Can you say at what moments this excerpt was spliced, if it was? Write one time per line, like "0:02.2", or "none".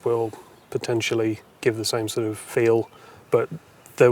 0:01.5
0:02.5